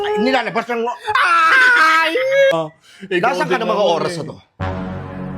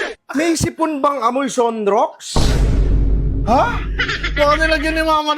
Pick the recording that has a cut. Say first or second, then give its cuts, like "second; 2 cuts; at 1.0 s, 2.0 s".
first; 1 cut; at 2.5 s